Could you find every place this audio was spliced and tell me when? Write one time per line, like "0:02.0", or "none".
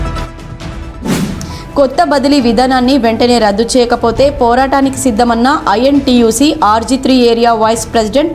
0:01.1